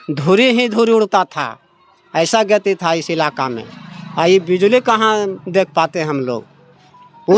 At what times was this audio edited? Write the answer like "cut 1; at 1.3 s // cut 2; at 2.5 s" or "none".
none